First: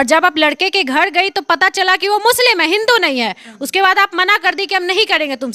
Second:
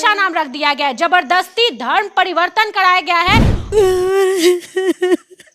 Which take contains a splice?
second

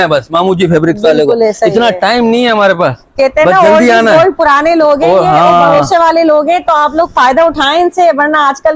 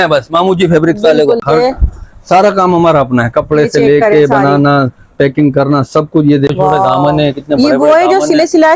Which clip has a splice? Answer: second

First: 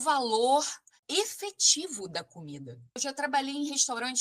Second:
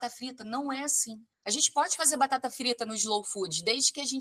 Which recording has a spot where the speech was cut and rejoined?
first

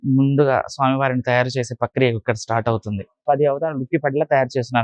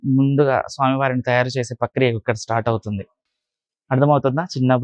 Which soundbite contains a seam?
first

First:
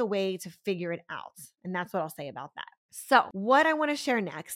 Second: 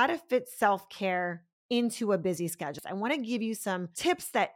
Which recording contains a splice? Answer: second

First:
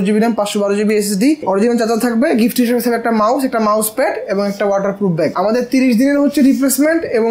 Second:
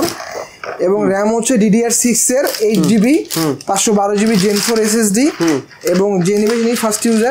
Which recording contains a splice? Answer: first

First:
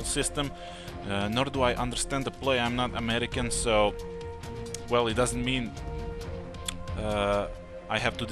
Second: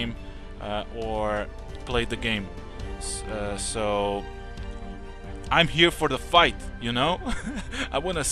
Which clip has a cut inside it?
second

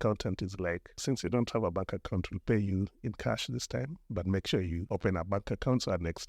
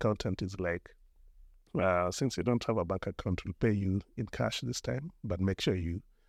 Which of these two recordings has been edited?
first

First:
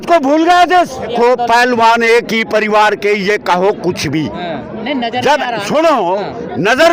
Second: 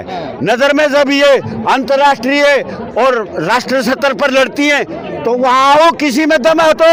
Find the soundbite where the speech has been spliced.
first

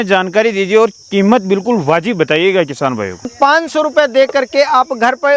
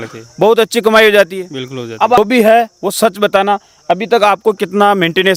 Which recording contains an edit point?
first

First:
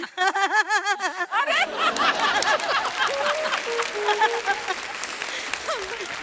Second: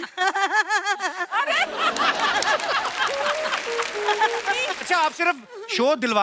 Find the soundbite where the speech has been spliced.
second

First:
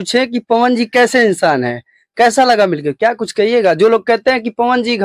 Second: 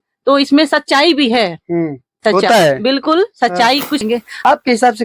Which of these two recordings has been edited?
second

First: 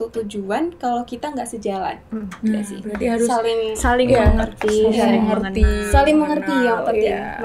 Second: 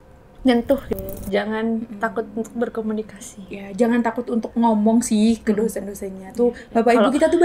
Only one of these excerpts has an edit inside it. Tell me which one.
second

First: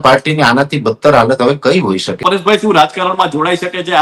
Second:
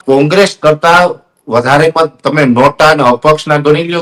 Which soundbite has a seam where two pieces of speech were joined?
first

